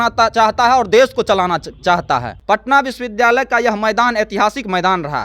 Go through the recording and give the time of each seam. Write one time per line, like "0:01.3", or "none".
0:02.3